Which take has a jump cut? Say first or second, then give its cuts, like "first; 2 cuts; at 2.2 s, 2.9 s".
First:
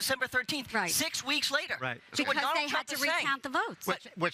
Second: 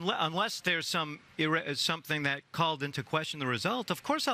first; 1 cut; at 1.2 s